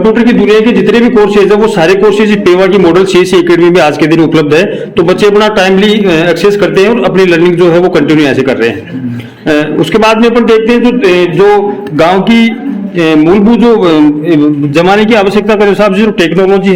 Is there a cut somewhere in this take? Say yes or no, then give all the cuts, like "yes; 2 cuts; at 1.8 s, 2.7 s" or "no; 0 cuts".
no; 0 cuts